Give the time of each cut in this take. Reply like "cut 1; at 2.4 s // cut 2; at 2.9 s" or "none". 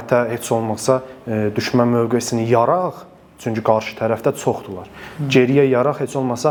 none